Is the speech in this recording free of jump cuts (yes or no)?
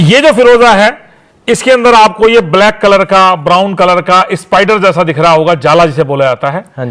yes